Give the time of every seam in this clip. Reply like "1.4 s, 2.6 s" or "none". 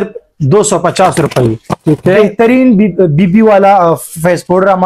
none